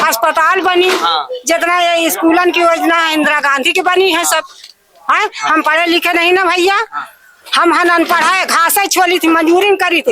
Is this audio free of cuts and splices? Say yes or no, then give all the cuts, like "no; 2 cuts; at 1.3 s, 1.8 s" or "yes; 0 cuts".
yes; 0 cuts